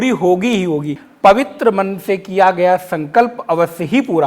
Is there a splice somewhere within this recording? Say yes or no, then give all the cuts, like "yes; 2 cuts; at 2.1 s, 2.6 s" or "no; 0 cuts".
yes; 1 cut; at 1.0 s